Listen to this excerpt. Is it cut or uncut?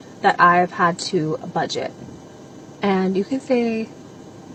uncut